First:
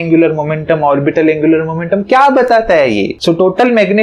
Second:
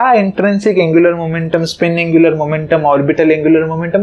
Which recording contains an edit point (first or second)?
first